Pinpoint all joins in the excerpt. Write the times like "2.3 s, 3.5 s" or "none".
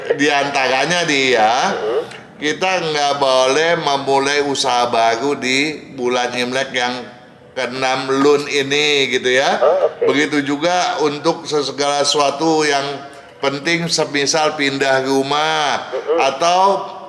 none